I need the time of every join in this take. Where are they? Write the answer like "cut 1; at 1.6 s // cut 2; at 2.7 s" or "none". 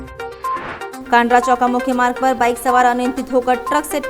cut 1; at 0.9 s